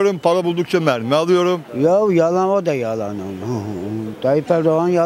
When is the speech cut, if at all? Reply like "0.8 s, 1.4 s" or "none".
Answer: 1.7 s